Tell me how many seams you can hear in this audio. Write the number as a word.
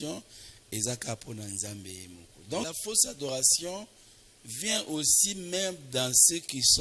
one